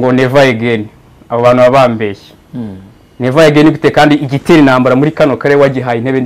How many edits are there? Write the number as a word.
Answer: zero